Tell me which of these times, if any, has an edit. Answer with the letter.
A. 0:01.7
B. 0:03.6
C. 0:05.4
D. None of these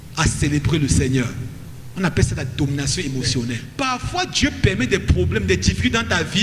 B